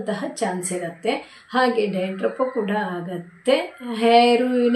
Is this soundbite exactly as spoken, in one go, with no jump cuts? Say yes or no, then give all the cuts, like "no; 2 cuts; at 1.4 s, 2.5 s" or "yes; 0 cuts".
yes; 0 cuts